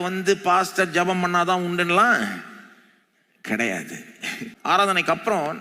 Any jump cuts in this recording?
yes; 1 cut; at 4.6 s

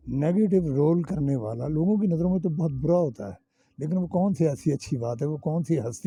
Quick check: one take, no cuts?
yes; 0 cuts

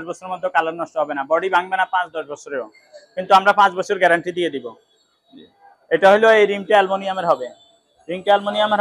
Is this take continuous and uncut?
yes; 0 cuts

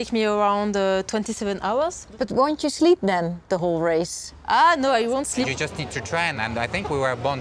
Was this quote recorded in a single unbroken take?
no; 2 cuts; at 2.0 s, 5.5 s

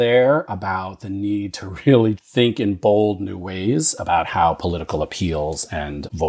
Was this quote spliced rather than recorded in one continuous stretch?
no; 0 cuts

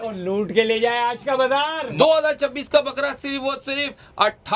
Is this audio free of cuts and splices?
no; 1 cut; at 1.8 s

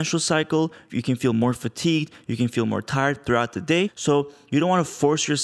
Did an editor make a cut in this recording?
yes; 1 cut; at 4.0 s

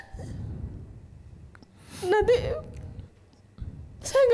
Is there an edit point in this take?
no; 0 cuts

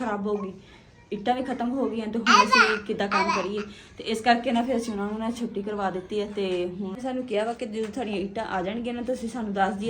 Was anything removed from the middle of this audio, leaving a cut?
yes; 1 cut; at 6.9 s

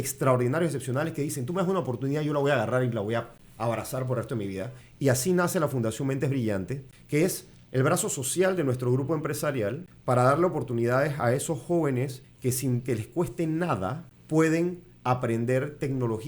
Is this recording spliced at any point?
yes; 6 cuts; at 3.4 s, 4.8 s, 7.3 s, 9.9 s, 12.2 s, 14.1 s

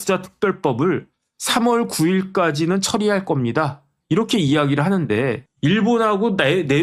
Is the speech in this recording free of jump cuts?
yes; 0 cuts

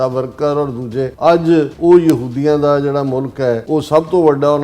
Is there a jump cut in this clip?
yes; 3 cuts; at 1.1 s, 1.7 s, 3.6 s

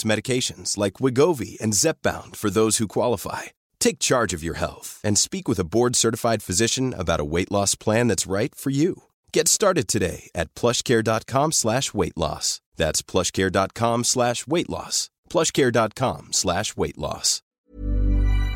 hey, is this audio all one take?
no; 1 cut; at 17.4 s

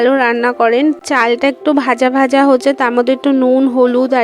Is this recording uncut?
yes; 0 cuts

